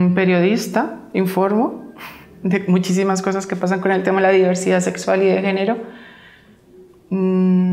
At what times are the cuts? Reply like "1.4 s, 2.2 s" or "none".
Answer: 5.9 s